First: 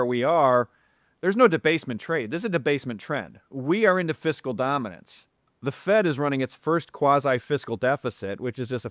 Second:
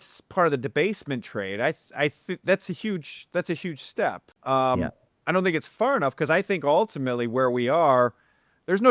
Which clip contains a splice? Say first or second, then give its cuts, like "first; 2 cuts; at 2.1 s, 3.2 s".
second; 1 cut; at 4.3 s